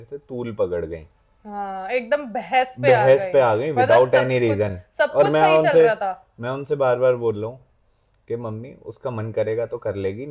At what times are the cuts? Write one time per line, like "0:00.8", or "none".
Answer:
none